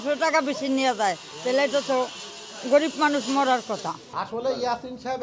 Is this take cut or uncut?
cut